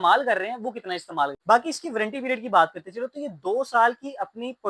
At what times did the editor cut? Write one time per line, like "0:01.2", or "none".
0:01.4